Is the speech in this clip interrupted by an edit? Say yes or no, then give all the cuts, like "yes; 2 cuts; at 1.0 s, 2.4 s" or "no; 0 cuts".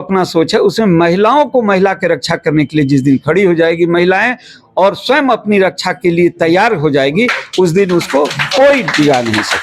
no; 0 cuts